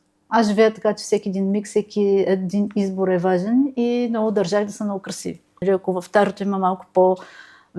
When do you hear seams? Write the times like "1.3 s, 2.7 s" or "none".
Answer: 5.5 s